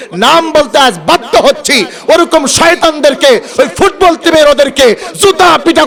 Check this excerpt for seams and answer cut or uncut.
uncut